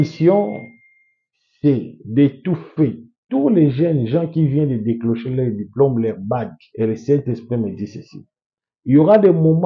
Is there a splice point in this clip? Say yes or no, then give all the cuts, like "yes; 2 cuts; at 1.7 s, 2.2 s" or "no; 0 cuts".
yes; 1 cut; at 6.6 s